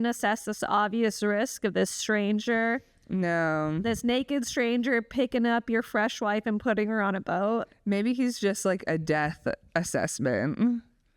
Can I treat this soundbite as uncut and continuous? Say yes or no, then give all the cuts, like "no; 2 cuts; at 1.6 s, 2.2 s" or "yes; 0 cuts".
yes; 0 cuts